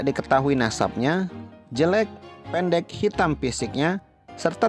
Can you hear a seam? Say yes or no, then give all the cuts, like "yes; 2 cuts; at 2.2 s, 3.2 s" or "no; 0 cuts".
no; 0 cuts